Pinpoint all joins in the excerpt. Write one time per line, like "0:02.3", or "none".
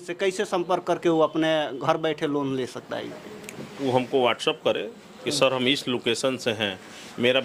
none

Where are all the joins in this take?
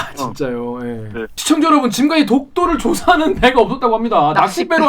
0:01.4

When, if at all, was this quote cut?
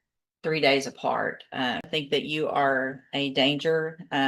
0:01.9

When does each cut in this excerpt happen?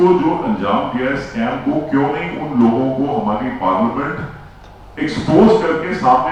none

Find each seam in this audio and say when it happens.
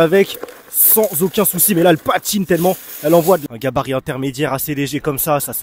0:03.4

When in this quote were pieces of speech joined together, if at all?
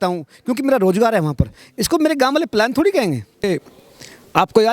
0:03.4

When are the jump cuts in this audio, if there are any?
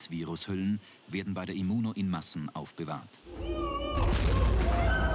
0:03.0

